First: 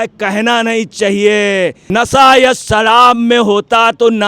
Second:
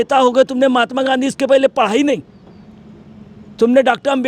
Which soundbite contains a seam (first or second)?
first